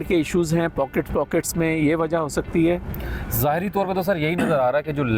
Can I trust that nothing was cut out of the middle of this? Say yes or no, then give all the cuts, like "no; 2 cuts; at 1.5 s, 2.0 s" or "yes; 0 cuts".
yes; 0 cuts